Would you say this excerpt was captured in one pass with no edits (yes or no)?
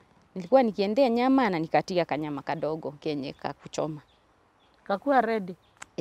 yes